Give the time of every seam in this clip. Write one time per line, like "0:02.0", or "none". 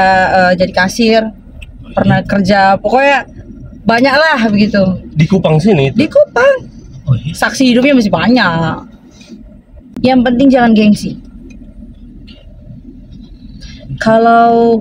0:09.9